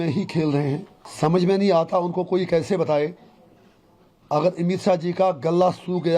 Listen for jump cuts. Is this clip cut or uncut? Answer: cut